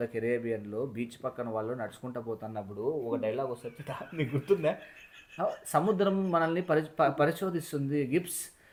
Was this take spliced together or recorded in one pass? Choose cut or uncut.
uncut